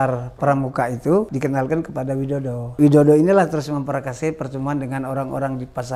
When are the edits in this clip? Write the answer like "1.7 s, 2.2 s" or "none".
1.3 s, 2.8 s